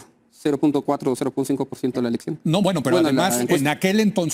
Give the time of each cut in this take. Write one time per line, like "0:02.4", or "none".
none